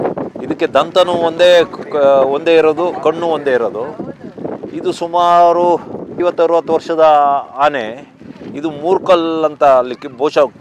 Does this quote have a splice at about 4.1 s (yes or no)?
no